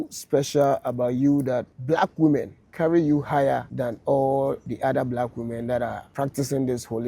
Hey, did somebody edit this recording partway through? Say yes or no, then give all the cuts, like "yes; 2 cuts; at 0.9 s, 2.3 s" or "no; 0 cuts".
yes; 5 cuts; at 1.7 s, 2.6 s, 3.7 s, 4.7 s, 6.0 s